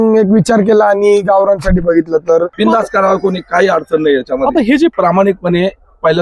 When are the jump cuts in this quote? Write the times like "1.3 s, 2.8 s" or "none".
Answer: 2.5 s, 4.9 s